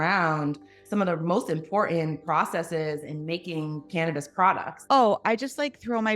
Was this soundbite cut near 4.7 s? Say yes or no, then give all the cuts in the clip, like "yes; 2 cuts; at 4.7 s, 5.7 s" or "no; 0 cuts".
yes; 1 cut; at 4.7 s